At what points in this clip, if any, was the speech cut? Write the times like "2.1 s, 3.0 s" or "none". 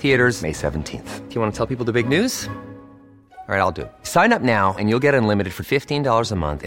none

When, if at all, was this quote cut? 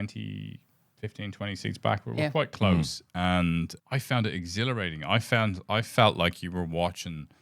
3.8 s

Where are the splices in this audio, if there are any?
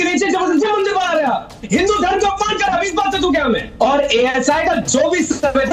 3.7 s

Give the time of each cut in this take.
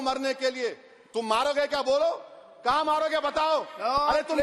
none

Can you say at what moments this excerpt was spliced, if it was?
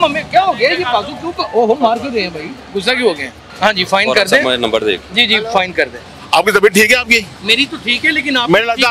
3.4 s, 6.1 s

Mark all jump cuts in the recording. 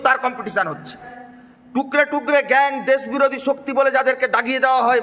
1.1 s

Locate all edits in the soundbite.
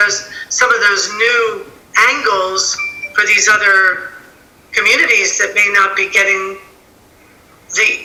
none

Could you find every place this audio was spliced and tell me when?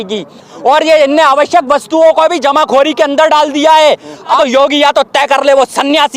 4.4 s

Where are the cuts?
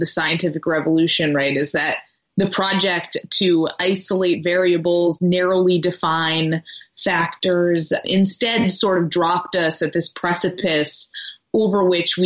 8.0 s

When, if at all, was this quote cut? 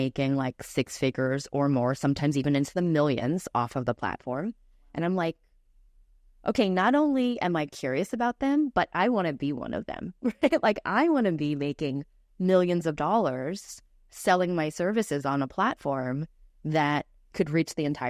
none

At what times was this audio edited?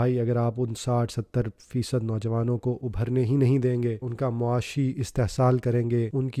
4.0 s

